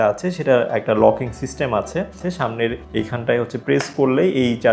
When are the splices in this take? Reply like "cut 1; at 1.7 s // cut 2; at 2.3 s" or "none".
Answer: none